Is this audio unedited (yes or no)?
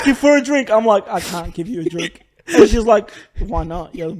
yes